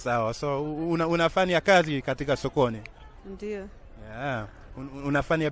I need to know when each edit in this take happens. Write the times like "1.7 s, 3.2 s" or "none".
none